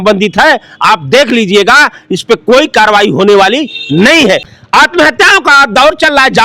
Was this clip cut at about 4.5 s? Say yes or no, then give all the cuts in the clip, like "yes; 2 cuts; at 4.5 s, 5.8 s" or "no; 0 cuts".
yes; 1 cut; at 4.5 s